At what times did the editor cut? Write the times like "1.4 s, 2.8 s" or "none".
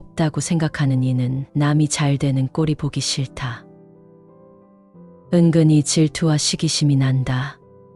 none